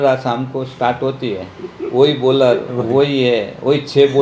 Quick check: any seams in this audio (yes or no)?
no